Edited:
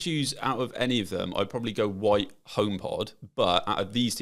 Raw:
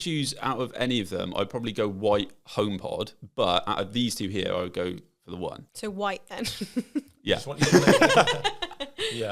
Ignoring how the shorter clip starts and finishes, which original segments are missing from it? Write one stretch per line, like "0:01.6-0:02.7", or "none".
none